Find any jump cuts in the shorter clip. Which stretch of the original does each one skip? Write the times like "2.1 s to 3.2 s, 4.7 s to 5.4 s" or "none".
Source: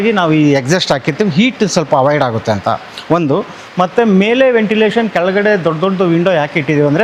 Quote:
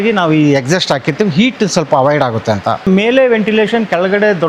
2.9 s to 4.1 s